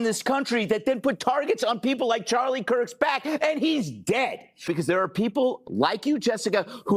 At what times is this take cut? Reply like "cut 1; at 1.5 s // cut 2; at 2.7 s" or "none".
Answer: cut 1; at 4.6 s